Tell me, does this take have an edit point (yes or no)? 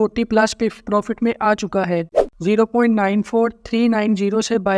yes